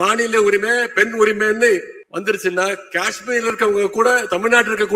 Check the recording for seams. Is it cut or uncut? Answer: cut